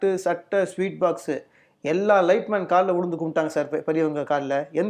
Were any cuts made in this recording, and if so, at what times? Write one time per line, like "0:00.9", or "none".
none